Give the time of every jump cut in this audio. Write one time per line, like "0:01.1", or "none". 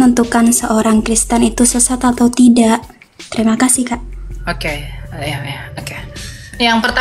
none